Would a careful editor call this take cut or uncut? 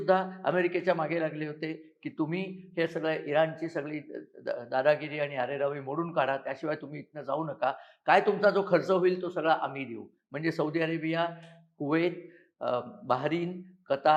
uncut